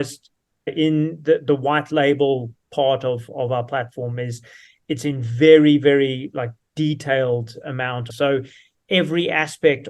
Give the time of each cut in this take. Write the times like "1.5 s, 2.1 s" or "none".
8.0 s